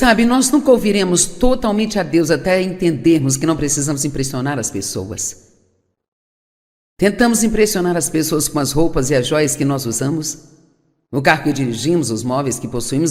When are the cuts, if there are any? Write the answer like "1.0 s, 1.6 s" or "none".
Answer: 11.2 s